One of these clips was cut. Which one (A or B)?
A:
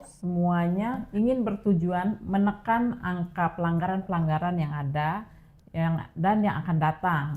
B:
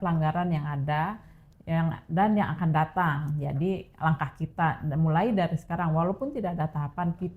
A